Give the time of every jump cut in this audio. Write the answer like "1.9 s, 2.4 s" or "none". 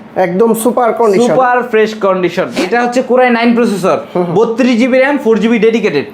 2.6 s